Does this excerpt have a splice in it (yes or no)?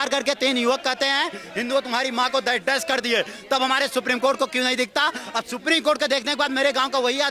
no